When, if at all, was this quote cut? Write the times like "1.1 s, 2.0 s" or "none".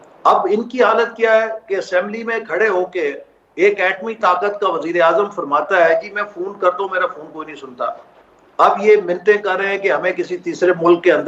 none